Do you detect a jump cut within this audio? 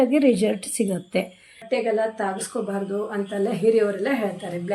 yes; 1 cut; at 1.6 s

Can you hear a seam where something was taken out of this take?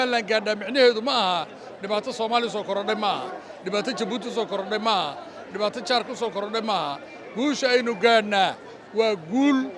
no; 0 cuts

